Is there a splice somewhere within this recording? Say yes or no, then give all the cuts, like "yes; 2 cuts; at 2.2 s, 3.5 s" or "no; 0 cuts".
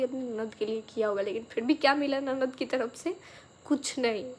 no; 0 cuts